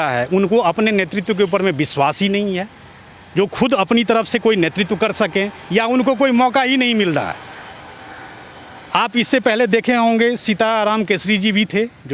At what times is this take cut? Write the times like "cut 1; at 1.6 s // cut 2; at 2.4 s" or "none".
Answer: none